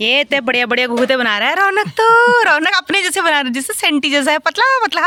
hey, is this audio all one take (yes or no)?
yes